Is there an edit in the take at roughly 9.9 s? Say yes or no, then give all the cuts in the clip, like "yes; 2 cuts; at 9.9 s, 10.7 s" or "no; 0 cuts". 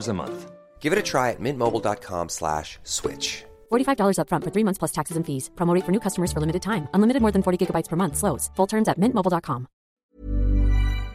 yes; 1 cut; at 9.9 s